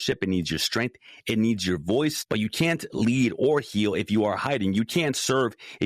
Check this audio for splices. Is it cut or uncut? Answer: cut